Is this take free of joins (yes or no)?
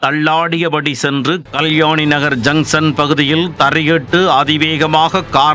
no